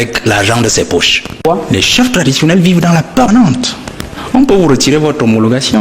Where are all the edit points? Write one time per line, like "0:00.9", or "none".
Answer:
0:01.4